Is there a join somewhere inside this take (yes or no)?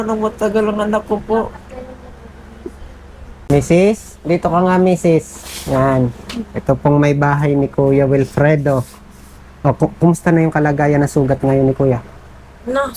no